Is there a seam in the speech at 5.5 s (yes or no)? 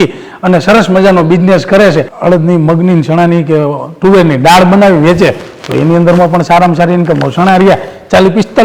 no